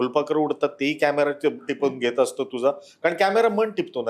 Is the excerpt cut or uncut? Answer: uncut